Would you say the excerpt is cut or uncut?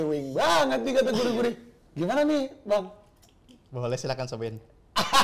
uncut